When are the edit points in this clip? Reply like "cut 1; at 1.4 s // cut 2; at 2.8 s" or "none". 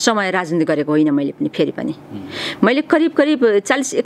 none